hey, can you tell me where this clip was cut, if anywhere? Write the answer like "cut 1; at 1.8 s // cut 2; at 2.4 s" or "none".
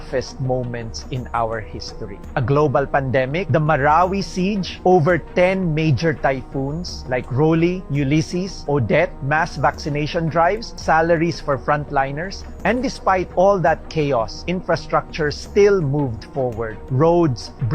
cut 1; at 2.2 s // cut 2; at 4.7 s